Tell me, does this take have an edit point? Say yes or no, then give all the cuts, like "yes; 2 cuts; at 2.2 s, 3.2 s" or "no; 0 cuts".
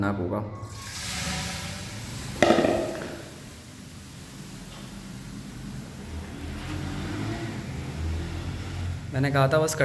no; 0 cuts